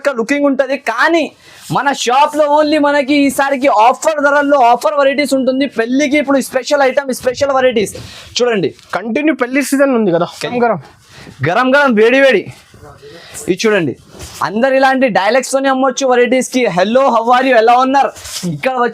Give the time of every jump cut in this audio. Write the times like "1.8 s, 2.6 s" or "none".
10.5 s